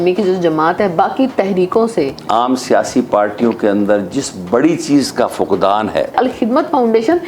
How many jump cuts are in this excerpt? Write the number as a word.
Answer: two